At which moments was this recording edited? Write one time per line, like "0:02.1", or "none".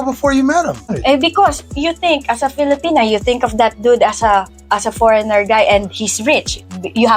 0:00.9